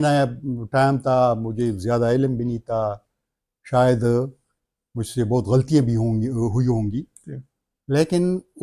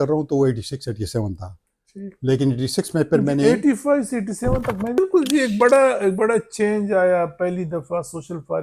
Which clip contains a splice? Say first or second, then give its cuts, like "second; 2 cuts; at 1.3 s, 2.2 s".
second; 1 cut; at 5.0 s